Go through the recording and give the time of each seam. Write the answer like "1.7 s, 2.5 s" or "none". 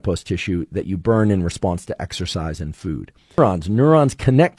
3.4 s